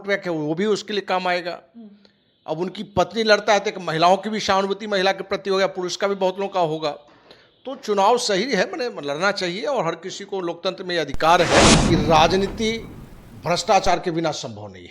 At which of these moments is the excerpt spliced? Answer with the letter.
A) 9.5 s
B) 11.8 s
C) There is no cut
B